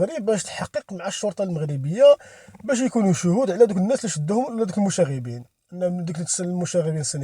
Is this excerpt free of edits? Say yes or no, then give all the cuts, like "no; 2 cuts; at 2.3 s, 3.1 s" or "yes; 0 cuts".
yes; 0 cuts